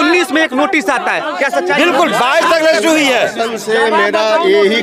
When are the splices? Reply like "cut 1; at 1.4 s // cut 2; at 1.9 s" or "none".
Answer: none